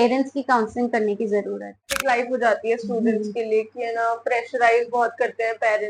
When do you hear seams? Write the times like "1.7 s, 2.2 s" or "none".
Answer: 1.9 s